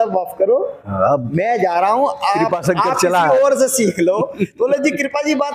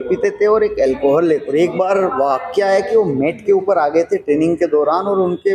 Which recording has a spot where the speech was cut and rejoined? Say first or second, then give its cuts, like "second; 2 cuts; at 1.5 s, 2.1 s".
second; 1 cut; at 1.5 s